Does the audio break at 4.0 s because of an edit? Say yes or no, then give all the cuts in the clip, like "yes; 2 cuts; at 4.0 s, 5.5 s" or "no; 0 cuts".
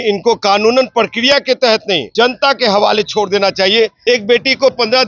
yes; 2 cuts; at 2.1 s, 4.0 s